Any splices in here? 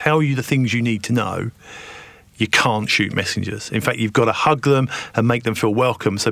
no; 0 cuts

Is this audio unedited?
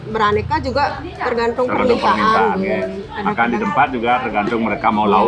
yes; 0 cuts

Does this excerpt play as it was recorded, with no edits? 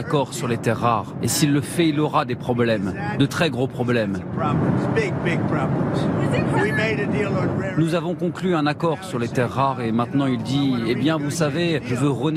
yes; 0 cuts

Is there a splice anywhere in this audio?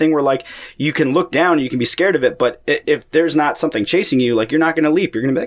no; 0 cuts

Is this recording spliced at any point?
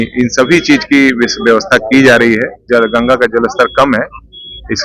yes; 1 cut; at 2.6 s

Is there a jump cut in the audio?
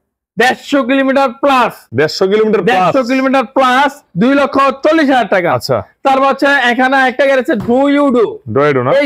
no; 0 cuts

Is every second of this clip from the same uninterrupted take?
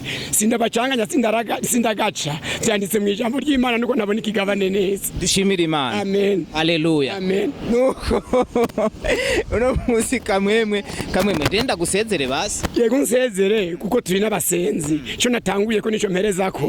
yes; 0 cuts

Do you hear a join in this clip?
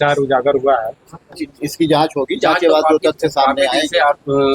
yes; 1 cut; at 1.5 s

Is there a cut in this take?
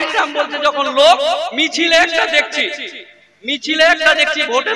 no; 0 cuts

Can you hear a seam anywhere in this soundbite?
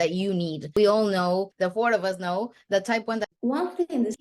yes; 1 cut; at 3.2 s

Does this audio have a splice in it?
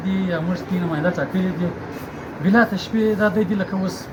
no; 0 cuts

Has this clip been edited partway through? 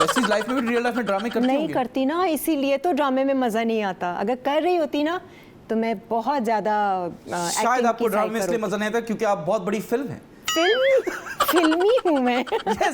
no; 0 cuts

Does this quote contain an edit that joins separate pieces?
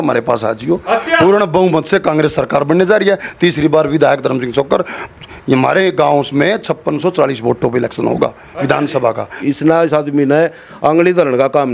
yes; 1 cut; at 9.4 s

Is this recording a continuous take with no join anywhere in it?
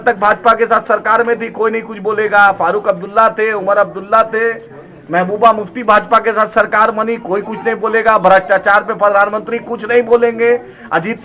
yes; 0 cuts

